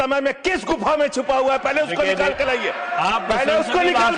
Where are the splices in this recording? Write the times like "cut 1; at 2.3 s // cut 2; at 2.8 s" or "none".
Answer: none